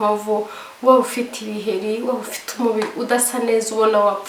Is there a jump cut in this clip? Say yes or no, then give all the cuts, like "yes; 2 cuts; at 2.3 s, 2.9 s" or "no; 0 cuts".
no; 0 cuts